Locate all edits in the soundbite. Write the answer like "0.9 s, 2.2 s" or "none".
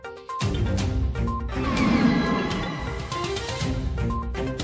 none